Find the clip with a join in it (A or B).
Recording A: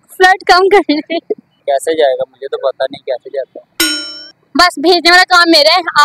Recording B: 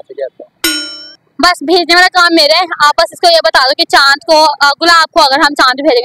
A